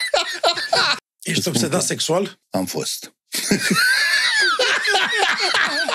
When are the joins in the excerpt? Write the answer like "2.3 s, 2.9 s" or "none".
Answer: 0.9 s, 2.4 s